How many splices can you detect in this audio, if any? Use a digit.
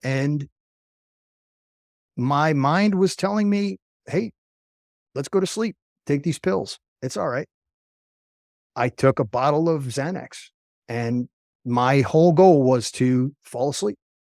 0